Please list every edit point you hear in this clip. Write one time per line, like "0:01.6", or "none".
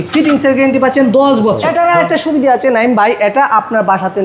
0:01.6